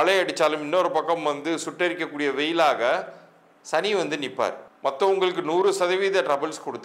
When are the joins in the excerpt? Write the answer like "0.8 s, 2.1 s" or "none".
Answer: 4.7 s